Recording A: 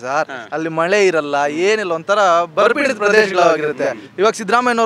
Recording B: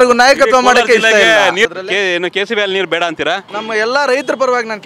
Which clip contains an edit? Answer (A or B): B